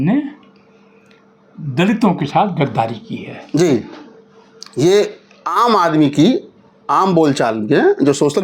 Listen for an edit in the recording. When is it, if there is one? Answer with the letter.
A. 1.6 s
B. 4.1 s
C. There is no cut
C